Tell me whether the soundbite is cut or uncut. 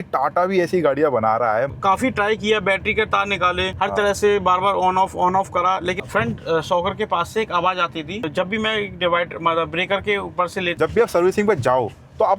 cut